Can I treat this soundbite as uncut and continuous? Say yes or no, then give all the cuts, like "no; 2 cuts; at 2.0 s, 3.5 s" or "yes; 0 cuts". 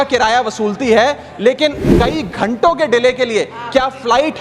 no; 1 cut; at 1.9 s